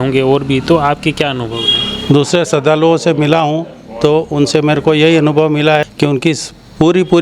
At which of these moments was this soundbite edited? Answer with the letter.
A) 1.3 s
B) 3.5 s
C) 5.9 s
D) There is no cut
C